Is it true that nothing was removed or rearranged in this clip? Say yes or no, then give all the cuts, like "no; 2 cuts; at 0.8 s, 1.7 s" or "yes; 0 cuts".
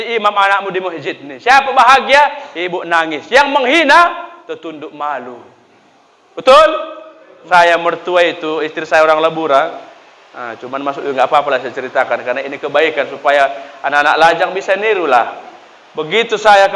no; 1 cut; at 7.3 s